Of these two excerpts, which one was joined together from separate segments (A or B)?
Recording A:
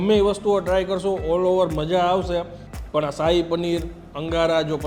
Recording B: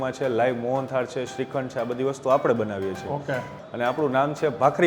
B